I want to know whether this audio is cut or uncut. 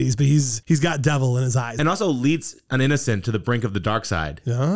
cut